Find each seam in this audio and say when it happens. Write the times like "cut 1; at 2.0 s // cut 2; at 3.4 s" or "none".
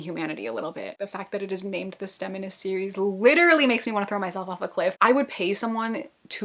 cut 1; at 1.0 s // cut 2; at 5.0 s

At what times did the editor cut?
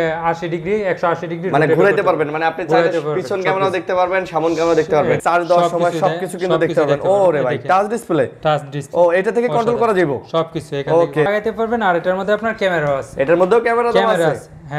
cut 1; at 5.2 s // cut 2; at 11.3 s

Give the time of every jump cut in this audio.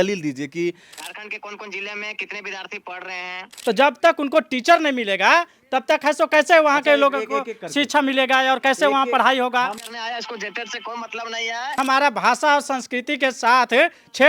cut 1; at 0.9 s // cut 2; at 3.5 s // cut 3; at 9.8 s // cut 4; at 11.8 s

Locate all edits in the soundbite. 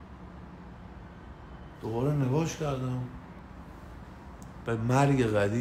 cut 1; at 3.4 s

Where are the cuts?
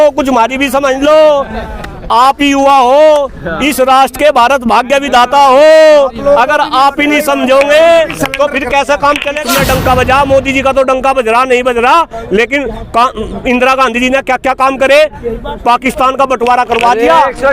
cut 1; at 9.5 s

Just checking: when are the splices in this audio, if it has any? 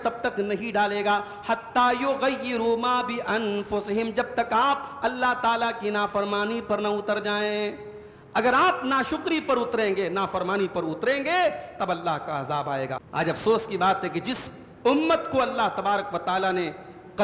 cut 1; at 13.0 s

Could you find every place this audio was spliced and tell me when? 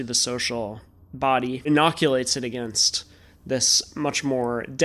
cut 1; at 1.7 s

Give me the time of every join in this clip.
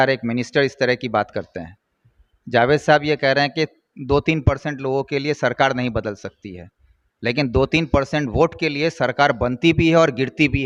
none

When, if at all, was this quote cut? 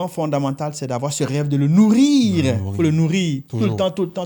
none

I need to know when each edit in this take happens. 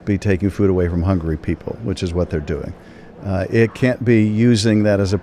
none

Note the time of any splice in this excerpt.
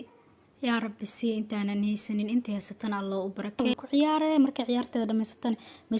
cut 1; at 3.7 s

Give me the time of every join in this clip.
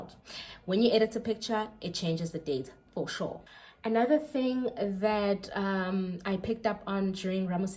none

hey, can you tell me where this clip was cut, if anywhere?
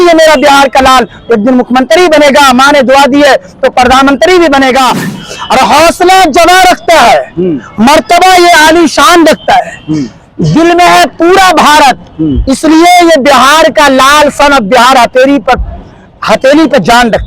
cut 1; at 5.0 s

